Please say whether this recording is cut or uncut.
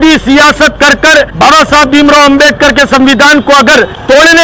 uncut